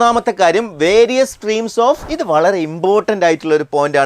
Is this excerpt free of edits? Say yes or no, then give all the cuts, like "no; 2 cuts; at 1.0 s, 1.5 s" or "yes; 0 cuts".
no; 1 cut; at 2.1 s